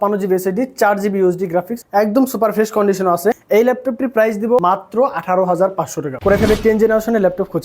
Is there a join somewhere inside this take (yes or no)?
yes